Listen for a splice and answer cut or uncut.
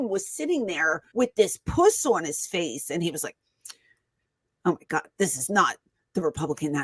cut